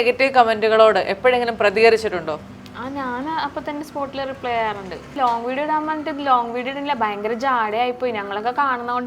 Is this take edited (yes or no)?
yes